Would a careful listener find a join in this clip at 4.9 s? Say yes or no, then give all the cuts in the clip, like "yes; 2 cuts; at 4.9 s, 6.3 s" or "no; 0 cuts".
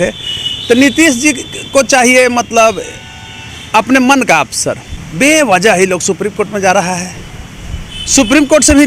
yes; 1 cut; at 4.9 s